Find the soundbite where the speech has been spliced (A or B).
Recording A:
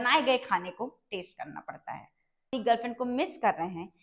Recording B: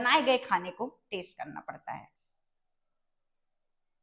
A